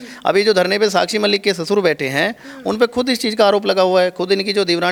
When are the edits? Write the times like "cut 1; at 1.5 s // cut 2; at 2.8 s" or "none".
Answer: none